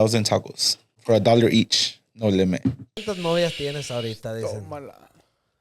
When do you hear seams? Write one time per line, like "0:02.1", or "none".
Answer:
0:00.9
0:02.9